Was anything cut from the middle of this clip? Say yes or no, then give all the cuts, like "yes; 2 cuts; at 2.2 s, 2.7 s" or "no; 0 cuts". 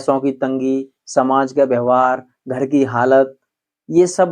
no; 0 cuts